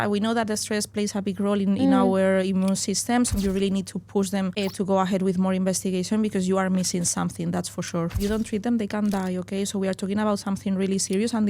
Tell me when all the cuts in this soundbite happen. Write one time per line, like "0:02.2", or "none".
0:03.3
0:04.5
0:08.2